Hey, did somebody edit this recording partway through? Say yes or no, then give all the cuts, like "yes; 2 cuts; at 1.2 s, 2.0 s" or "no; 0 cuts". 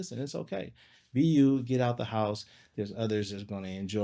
no; 0 cuts